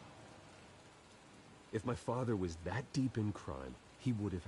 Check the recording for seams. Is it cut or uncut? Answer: cut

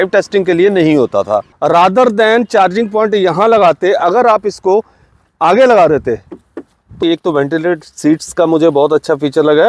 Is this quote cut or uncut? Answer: cut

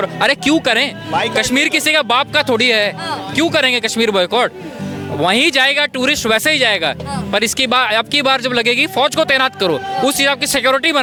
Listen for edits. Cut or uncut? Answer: uncut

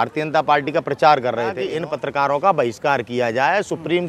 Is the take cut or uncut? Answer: cut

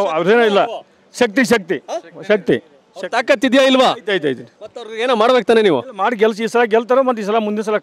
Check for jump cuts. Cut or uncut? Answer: uncut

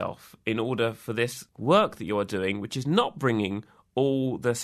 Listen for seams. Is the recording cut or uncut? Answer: cut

